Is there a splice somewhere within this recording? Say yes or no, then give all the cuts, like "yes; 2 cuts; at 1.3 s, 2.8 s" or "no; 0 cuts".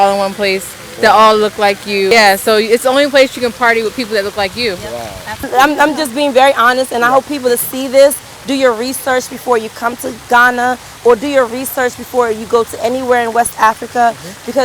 yes; 2 cuts; at 2.1 s, 5.5 s